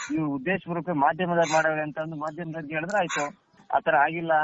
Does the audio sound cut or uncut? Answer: cut